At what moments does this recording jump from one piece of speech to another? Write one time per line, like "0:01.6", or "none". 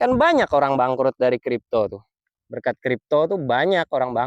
none